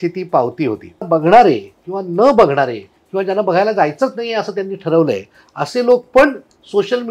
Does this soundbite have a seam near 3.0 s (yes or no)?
no